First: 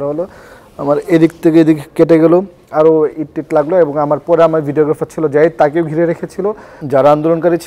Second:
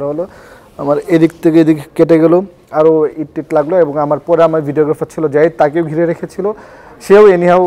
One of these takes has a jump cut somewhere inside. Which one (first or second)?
first